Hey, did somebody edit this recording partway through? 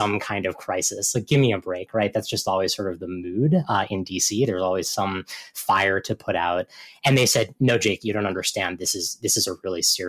no; 0 cuts

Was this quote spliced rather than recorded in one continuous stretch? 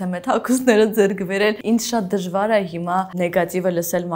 yes; 2 cuts; at 1.6 s, 3.1 s

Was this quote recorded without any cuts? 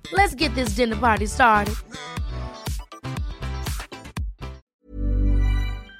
no; 1 cut; at 4.6 s

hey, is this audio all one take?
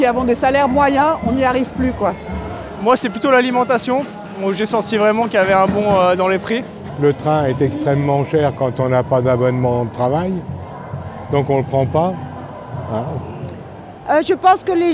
no; 3 cuts; at 2.7 s, 6.9 s, 13.6 s

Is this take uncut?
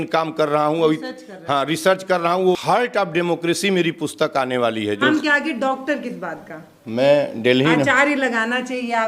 no; 2 cuts; at 2.6 s, 5.0 s

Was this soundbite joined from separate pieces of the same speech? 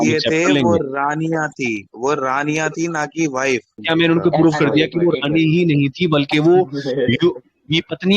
yes; 1 cut; at 3.7 s

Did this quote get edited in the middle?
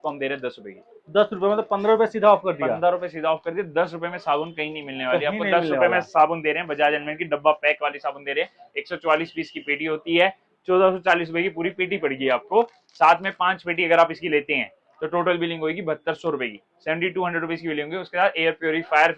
no; 0 cuts

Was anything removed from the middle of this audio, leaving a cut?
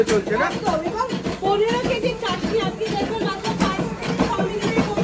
no; 0 cuts

